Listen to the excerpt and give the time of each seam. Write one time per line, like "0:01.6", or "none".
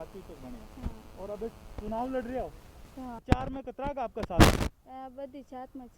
0:03.2
0:04.8